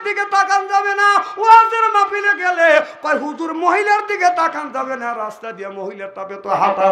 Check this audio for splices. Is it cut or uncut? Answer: uncut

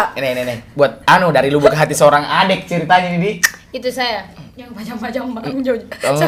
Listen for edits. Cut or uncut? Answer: uncut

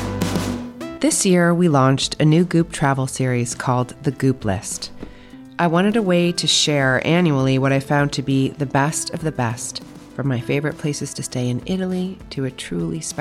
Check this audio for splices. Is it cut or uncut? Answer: cut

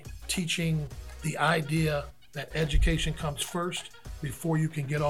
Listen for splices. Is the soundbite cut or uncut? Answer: cut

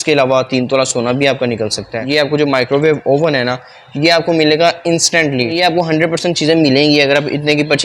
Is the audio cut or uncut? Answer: cut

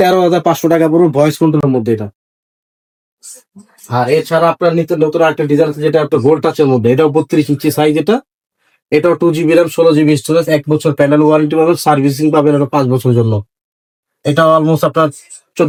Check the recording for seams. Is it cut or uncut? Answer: uncut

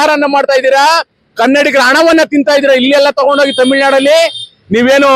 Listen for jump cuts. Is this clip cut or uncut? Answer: uncut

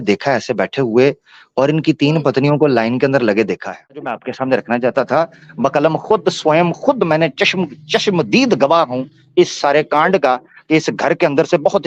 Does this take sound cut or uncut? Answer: cut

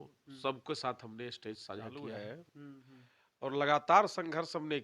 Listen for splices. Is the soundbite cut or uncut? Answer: cut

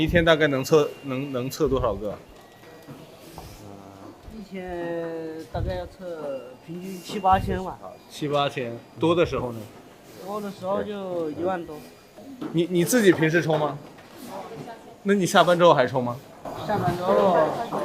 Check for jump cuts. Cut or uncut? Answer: uncut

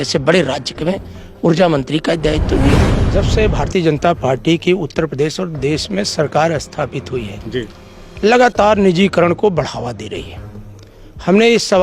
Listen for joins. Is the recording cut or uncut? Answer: cut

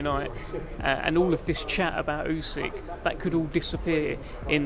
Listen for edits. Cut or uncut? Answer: uncut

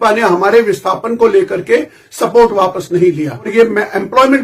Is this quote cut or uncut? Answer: cut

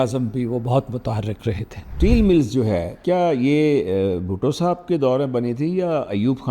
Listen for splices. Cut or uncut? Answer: cut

